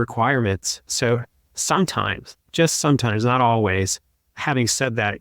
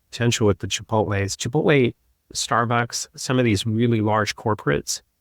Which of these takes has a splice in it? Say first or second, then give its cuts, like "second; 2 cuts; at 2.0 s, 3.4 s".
first; 1 cut; at 4.2 s